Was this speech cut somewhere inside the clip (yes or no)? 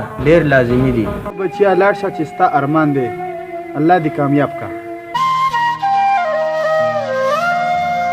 yes